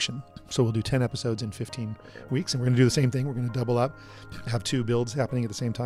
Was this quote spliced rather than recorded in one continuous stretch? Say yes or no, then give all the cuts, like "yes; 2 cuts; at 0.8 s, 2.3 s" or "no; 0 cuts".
no; 0 cuts